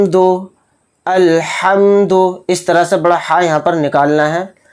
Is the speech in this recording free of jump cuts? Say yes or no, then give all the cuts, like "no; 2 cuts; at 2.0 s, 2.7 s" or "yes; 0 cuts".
yes; 0 cuts